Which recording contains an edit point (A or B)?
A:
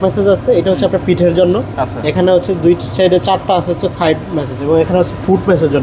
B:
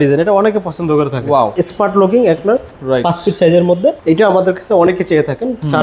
B